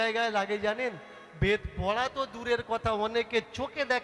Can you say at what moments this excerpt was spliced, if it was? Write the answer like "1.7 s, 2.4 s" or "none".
none